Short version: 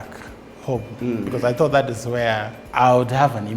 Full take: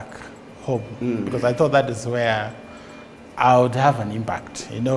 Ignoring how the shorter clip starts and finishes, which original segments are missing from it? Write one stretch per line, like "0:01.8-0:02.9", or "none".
0:02.6-0:03.2